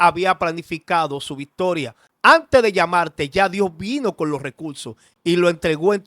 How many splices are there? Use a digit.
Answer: 1